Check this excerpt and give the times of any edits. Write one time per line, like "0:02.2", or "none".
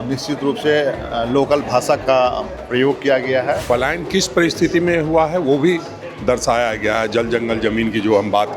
0:03.6